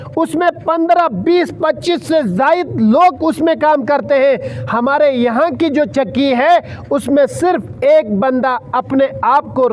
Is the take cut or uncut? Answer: uncut